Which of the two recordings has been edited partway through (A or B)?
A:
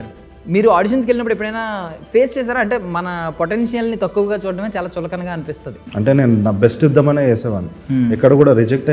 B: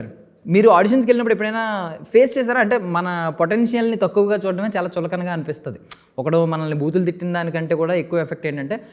A